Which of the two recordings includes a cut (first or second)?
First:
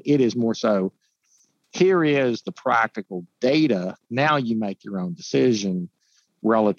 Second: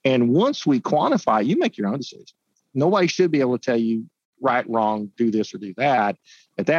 second